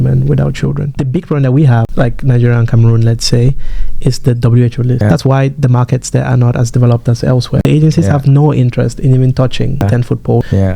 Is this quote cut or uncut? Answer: cut